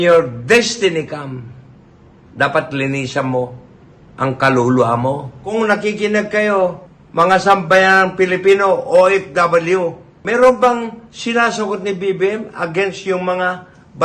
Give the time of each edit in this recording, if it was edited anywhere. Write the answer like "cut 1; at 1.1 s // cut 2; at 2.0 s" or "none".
cut 1; at 5.4 s